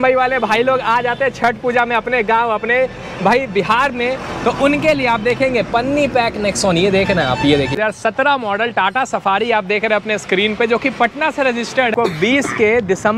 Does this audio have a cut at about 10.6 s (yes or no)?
no